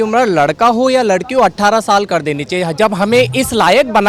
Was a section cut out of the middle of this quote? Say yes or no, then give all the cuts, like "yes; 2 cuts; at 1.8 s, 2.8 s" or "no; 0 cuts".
no; 0 cuts